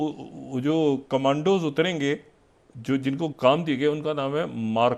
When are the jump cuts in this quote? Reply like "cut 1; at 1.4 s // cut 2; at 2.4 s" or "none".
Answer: none